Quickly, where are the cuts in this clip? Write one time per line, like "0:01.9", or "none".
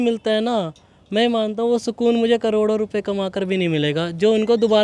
none